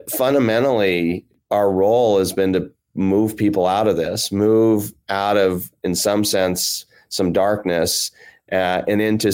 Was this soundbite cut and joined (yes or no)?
yes